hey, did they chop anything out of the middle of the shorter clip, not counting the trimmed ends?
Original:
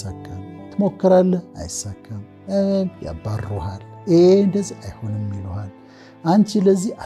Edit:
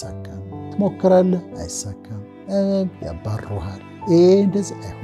no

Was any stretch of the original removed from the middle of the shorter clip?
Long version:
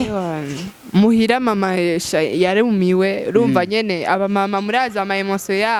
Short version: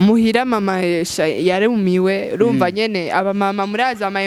no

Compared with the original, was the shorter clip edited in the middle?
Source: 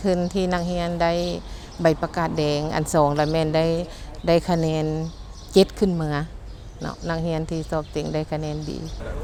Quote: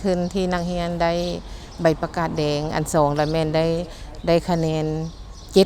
no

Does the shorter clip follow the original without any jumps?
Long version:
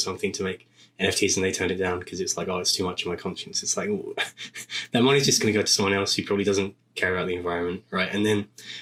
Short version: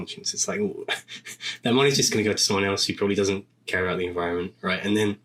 yes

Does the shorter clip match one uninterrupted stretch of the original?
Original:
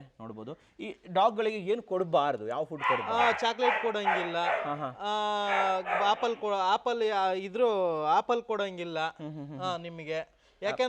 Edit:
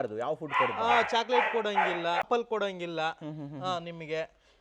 no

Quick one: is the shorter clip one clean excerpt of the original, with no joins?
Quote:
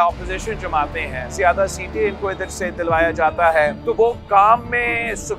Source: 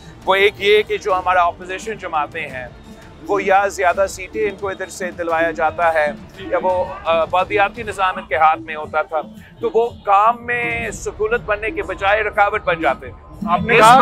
no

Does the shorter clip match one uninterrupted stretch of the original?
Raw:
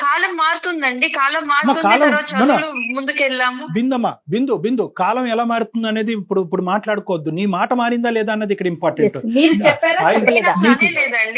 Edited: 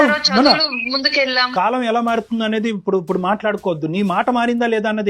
no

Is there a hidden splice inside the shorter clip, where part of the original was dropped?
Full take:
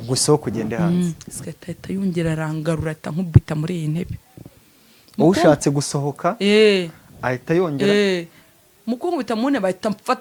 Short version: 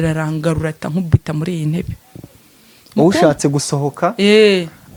no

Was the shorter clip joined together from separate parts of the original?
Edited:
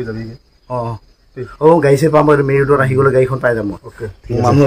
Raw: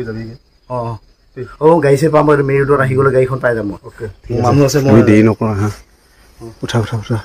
no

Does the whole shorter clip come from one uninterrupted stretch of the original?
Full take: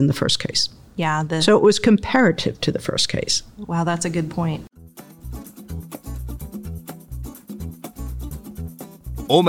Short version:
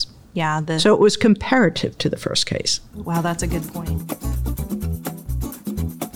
no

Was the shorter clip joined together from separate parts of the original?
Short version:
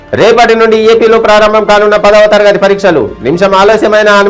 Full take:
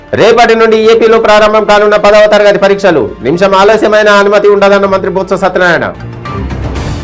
no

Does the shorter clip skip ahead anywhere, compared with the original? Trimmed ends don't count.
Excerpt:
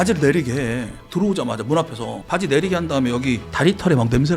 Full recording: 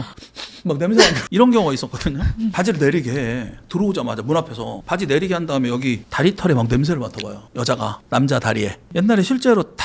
no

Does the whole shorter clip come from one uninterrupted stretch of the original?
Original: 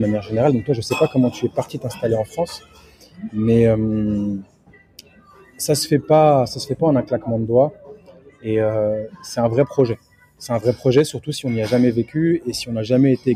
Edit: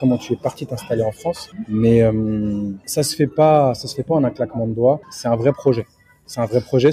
no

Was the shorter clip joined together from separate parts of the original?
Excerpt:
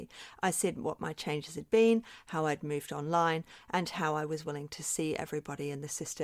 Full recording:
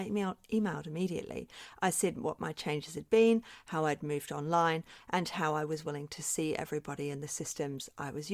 no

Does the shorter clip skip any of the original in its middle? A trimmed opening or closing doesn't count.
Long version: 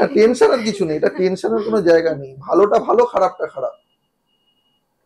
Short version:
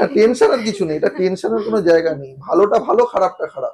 no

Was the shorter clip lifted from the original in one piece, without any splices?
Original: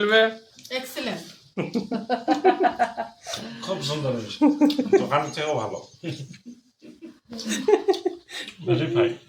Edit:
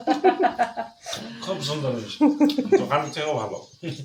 yes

